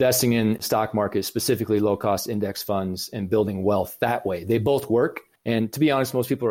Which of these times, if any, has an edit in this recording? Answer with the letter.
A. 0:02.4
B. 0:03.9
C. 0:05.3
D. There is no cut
C